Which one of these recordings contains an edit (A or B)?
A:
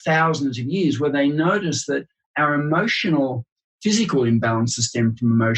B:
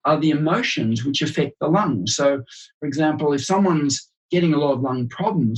A